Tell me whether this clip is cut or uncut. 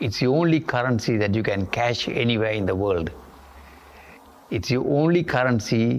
uncut